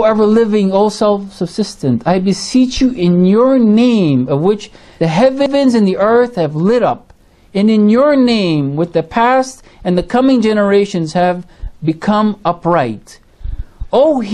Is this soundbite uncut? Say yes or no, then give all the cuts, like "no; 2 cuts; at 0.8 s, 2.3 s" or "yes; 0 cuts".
yes; 0 cuts